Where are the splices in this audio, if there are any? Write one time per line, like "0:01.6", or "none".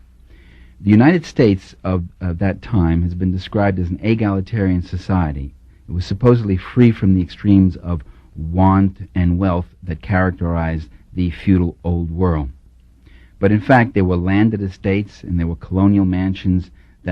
0:09.1